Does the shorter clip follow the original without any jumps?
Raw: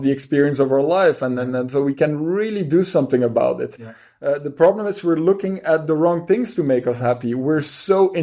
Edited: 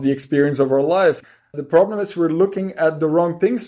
no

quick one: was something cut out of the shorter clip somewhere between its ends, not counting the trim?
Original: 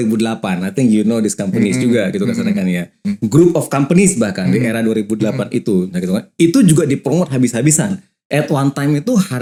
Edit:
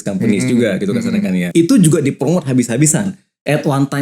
yes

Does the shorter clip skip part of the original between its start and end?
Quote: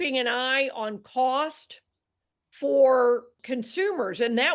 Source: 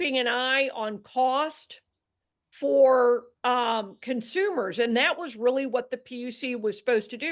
yes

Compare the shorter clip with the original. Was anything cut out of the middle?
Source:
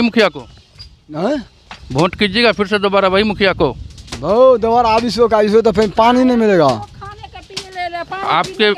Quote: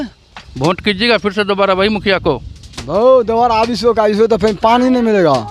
no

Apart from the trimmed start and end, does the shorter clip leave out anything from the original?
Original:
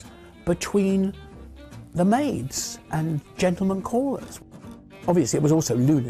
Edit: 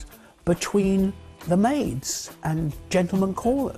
yes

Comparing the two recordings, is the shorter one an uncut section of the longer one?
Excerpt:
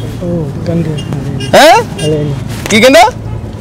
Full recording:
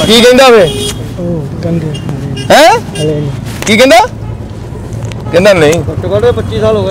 yes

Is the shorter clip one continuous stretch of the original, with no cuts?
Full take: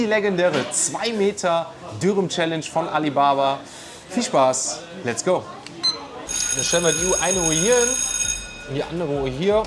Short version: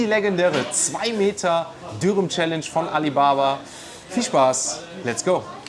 yes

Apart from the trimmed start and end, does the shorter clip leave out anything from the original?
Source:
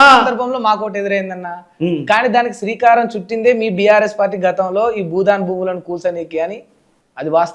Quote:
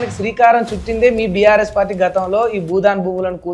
no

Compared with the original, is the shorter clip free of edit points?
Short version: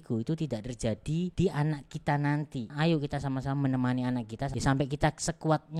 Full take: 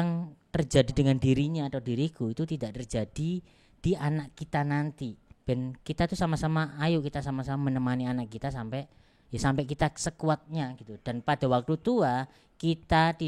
no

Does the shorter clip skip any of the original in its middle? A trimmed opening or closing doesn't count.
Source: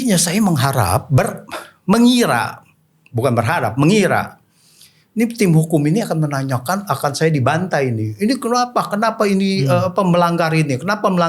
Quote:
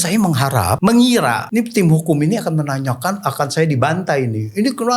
yes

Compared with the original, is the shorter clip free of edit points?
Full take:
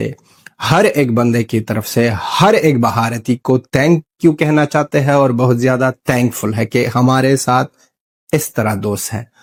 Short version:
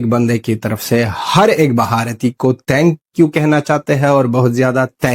yes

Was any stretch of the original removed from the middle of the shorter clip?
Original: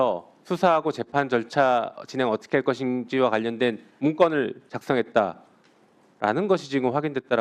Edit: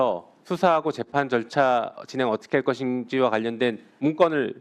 no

